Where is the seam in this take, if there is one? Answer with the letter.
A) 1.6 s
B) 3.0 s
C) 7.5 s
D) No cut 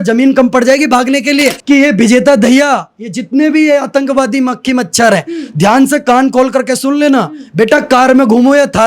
A